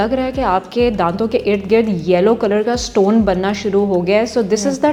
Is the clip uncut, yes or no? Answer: yes